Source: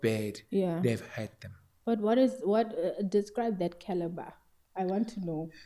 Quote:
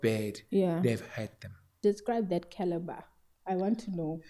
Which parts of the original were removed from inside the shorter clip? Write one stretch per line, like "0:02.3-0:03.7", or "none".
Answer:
0:01.7-0:03.0